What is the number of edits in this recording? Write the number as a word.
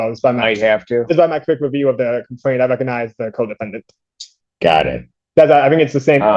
zero